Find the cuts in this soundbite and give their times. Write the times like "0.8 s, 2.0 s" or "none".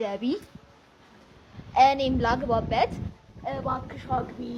none